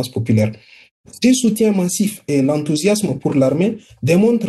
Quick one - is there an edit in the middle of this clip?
yes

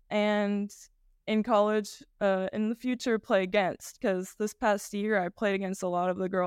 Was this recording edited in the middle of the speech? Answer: no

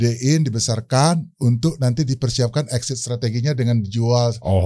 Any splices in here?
no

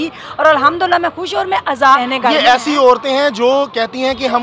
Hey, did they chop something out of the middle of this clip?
yes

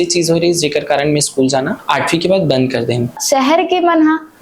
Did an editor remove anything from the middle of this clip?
yes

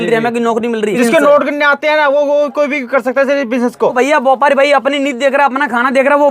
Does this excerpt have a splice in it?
yes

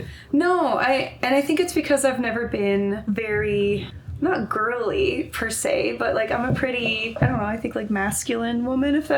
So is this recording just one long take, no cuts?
no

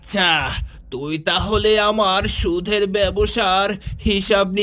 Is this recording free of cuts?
yes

